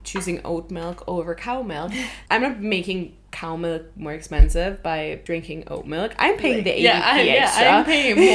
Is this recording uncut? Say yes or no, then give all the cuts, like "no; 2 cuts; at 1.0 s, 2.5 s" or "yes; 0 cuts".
no; 2 cuts; at 2.1 s, 5.2 s